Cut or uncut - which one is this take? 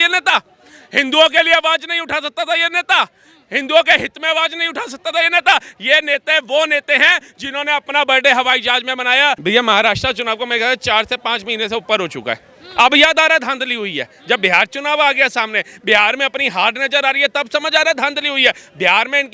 cut